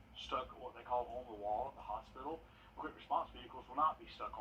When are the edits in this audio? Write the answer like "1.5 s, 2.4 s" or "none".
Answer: 2.4 s